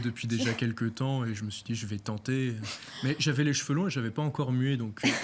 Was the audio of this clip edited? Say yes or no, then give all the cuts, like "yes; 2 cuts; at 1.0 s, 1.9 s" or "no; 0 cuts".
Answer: no; 0 cuts